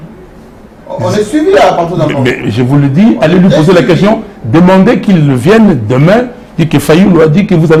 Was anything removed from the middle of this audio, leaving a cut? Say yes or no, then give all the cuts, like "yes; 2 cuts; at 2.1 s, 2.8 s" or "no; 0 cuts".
no; 0 cuts